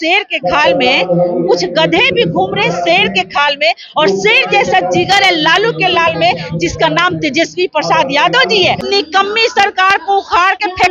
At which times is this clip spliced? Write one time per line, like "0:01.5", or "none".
0:08.8